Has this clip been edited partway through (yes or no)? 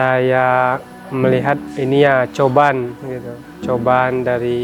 yes